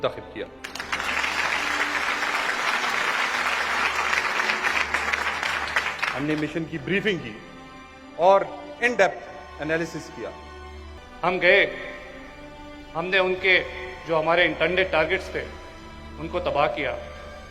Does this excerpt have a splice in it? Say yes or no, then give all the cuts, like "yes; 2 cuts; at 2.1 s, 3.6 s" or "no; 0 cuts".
yes; 1 cut; at 11.0 s